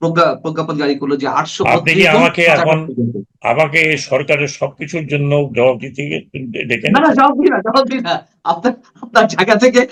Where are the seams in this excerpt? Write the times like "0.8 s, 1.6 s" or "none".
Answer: none